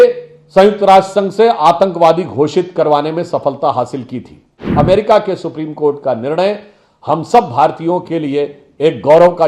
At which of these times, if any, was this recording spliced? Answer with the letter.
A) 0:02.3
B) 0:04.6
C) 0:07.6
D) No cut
B